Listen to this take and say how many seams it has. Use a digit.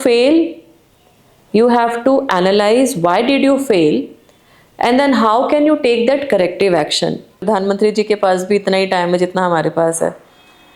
1